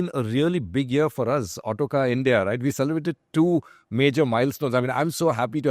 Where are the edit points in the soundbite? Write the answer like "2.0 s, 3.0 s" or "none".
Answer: none